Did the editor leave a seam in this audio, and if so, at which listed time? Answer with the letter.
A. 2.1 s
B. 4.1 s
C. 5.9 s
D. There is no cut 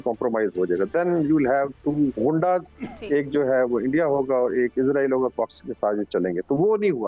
A